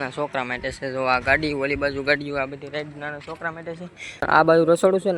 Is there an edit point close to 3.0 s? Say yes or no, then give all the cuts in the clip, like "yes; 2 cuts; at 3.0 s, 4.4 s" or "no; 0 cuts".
no; 1 cut; at 4.3 s